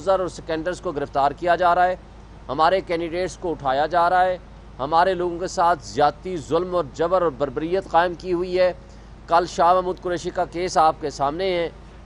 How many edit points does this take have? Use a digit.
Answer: 0